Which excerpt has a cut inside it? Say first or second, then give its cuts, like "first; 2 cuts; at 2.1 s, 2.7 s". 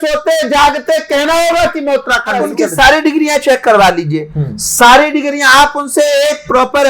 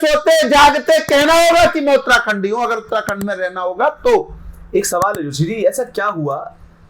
first; 1 cut; at 2.4 s